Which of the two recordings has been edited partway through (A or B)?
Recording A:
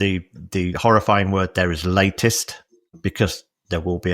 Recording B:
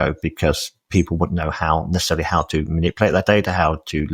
A